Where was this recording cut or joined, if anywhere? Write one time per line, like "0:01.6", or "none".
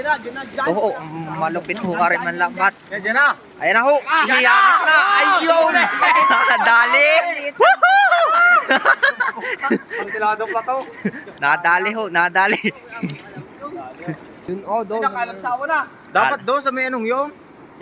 0:11.4
0:14.4